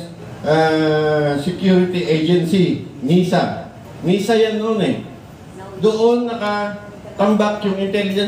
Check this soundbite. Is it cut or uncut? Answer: uncut